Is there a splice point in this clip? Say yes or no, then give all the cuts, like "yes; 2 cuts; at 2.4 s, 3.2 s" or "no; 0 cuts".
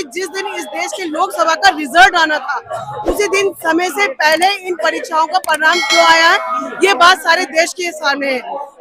no; 0 cuts